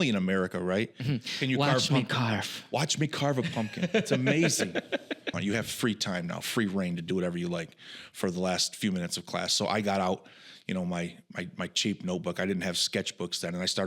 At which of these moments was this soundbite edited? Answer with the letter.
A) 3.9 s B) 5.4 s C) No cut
B